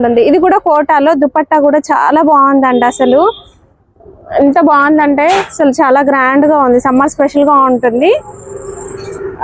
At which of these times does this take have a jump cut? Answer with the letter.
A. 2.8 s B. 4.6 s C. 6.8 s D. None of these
D